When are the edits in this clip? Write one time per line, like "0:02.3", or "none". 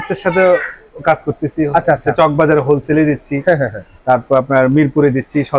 none